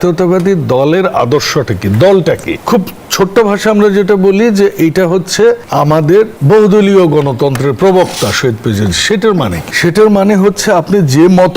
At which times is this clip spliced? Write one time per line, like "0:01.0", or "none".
0:02.5
0:06.1
0:09.6